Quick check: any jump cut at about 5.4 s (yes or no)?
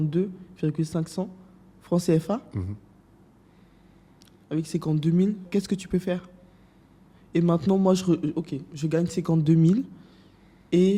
yes